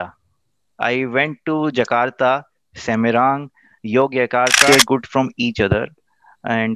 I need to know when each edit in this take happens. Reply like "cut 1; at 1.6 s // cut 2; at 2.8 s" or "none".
cut 1; at 4.7 s

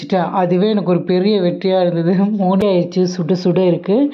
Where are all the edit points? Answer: cut 1; at 2.6 s

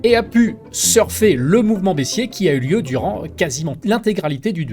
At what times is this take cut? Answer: cut 1; at 3.7 s

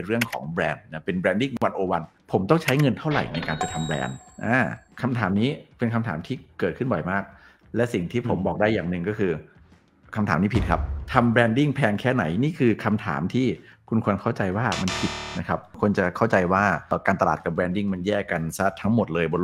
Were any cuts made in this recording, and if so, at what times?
cut 1; at 2.2 s // cut 2; at 15.7 s

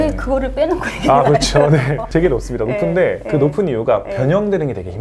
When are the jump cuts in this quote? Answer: cut 1; at 2.0 s

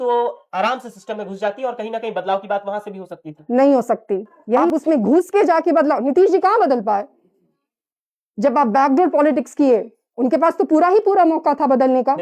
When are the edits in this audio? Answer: cut 1; at 4.7 s

